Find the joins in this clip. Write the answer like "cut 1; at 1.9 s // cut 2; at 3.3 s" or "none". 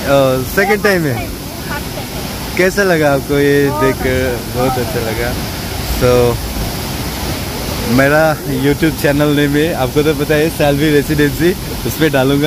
none